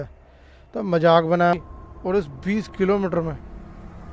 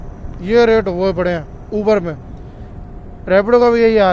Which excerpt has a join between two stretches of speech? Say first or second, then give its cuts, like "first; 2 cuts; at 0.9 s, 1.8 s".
first; 1 cut; at 1.5 s